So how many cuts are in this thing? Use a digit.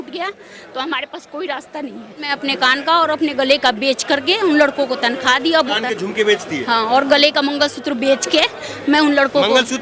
2